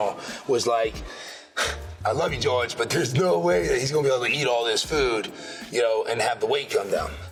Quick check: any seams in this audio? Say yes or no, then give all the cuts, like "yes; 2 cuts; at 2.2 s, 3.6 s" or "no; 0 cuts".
no; 0 cuts